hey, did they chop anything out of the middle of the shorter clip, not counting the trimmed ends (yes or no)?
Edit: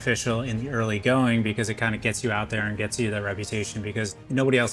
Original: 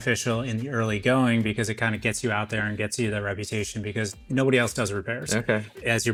no